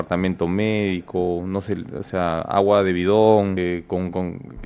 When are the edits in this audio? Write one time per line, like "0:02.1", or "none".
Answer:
0:03.6